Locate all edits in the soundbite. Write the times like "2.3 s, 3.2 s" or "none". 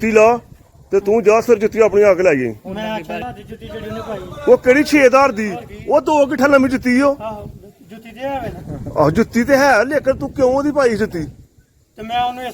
3.2 s